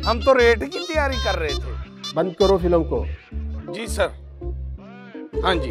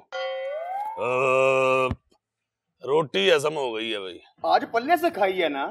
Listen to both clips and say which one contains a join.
second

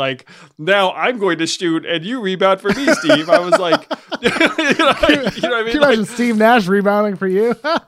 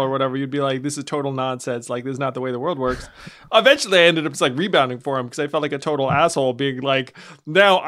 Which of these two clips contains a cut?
second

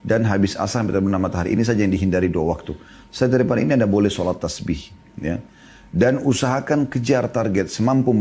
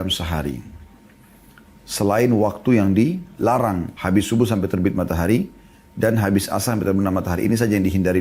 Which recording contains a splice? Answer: second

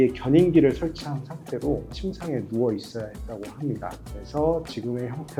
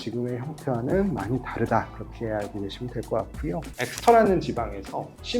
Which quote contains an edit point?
second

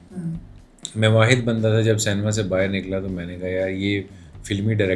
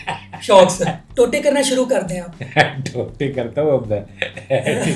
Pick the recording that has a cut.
second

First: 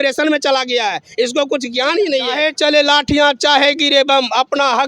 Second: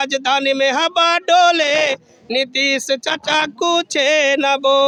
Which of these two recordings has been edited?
first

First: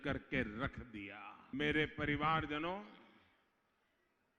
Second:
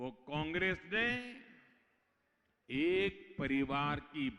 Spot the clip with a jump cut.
first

